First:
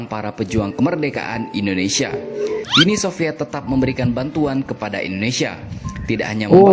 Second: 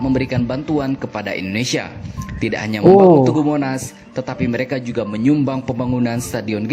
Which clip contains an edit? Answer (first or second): first